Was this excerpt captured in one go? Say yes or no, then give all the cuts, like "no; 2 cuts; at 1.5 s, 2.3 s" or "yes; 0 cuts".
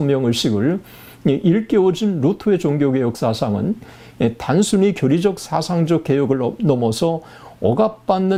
yes; 0 cuts